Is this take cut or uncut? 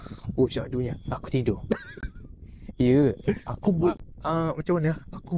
uncut